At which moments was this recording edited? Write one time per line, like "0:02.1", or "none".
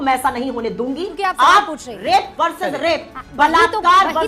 0:01.1